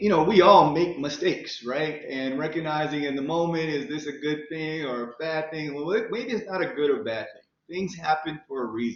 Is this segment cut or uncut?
uncut